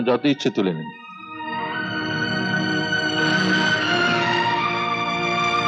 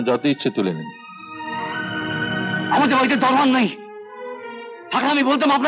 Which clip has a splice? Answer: second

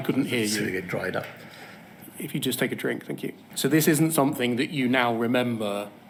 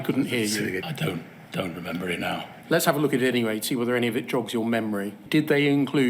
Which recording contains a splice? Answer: second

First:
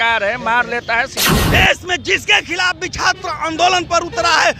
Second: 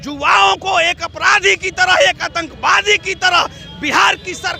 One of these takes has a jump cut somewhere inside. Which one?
first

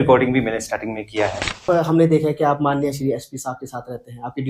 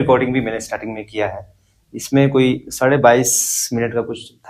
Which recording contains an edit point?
first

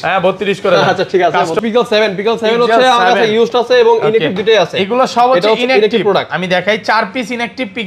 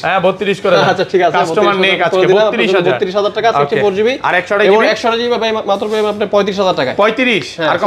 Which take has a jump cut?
first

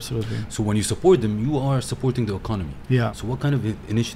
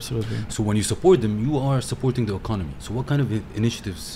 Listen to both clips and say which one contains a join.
second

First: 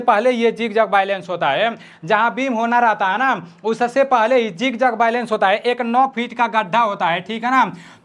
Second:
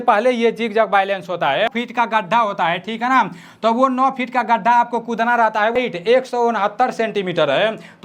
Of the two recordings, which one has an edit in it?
second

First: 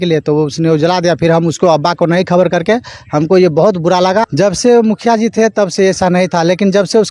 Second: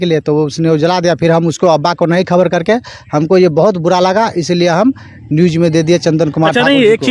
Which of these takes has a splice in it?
first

